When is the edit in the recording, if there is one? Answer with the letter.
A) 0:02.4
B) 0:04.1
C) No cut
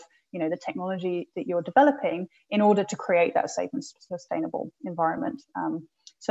C